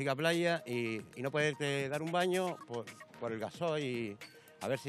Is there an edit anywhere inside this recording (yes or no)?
no